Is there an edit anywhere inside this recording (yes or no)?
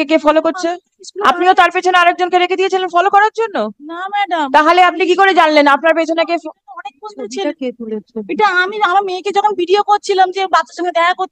no